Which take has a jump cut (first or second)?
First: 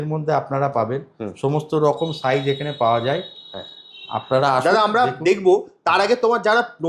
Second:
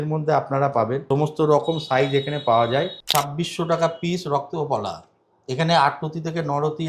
second